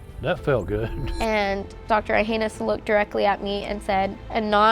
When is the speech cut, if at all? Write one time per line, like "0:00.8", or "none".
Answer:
0:01.1